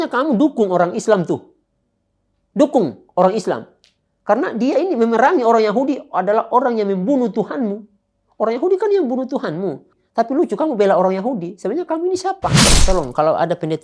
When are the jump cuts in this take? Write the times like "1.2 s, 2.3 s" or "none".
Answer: 9.9 s, 12.7 s